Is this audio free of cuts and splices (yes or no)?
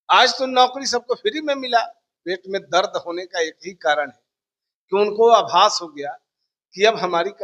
no